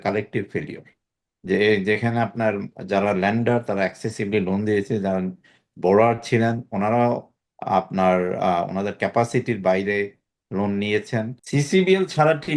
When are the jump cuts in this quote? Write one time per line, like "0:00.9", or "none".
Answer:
0:11.4